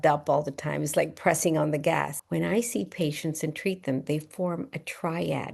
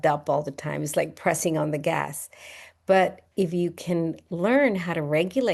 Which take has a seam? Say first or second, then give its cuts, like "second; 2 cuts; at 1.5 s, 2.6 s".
first; 1 cut; at 2.2 s